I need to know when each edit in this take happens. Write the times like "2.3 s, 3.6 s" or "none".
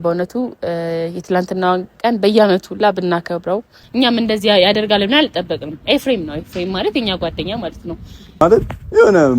3.8 s, 8.4 s